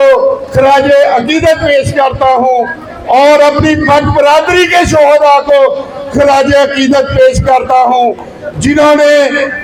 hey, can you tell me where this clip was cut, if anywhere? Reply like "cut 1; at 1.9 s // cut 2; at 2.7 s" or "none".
none